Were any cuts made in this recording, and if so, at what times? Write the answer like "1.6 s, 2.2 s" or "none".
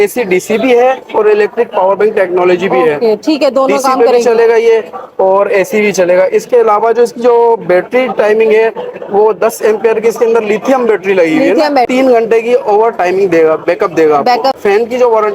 11.9 s, 14.6 s